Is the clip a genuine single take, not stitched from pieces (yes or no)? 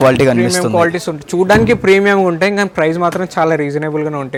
yes